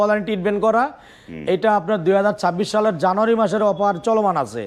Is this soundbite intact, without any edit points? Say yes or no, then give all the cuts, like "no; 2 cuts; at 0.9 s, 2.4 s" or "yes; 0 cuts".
yes; 0 cuts